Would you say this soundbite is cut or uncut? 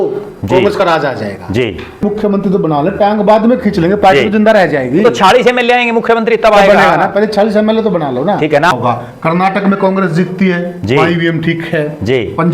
cut